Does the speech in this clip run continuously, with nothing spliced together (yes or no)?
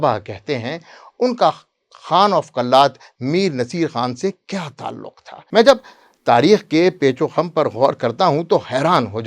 yes